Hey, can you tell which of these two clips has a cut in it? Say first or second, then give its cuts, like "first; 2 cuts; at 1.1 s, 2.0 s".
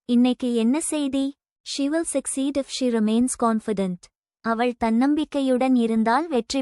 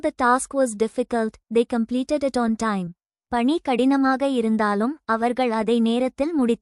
first; 1 cut; at 1.5 s